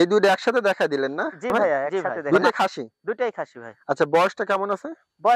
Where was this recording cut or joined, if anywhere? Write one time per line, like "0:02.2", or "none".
0:02.1